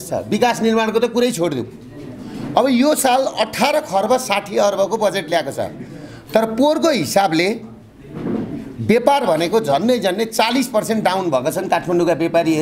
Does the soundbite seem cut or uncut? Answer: uncut